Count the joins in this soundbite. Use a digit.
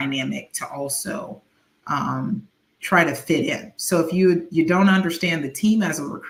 0